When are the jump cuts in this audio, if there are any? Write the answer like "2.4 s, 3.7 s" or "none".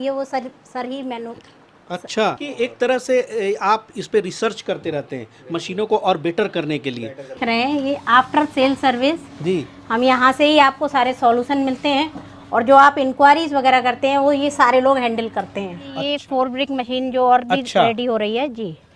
2.4 s, 7.4 s, 16.0 s